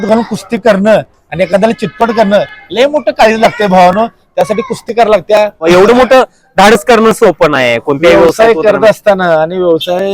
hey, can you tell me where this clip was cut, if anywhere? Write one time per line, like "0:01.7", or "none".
0:05.6